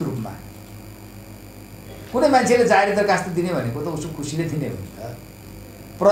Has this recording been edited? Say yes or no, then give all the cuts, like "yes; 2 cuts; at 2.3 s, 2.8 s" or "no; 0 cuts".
no; 0 cuts